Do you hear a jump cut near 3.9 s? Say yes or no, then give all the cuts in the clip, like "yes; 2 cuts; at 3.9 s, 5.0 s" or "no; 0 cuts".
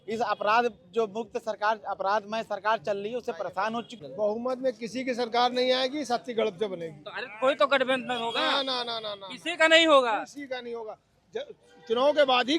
yes; 1 cut; at 3.9 s